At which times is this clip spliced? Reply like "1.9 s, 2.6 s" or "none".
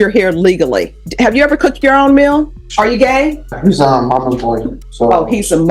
1.0 s, 2.6 s, 3.6 s, 4.8 s